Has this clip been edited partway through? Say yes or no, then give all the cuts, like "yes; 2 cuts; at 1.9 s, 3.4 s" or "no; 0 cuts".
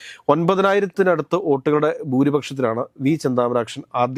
no; 0 cuts